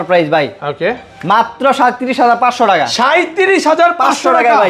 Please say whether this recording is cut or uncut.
uncut